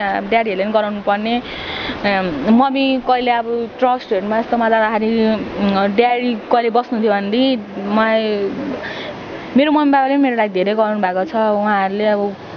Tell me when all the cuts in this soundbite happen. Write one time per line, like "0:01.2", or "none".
none